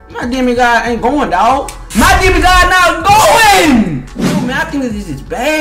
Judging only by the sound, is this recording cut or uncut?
cut